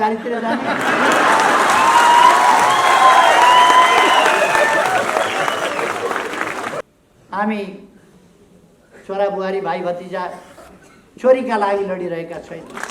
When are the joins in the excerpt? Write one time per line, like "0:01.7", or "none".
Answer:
0:06.8